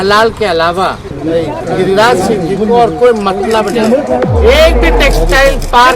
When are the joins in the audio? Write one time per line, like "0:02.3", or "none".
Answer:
0:01.1
0:04.3